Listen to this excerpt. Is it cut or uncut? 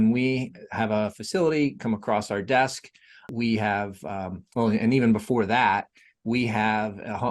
cut